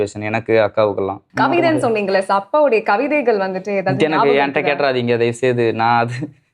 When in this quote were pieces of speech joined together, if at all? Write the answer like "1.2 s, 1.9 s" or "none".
1.2 s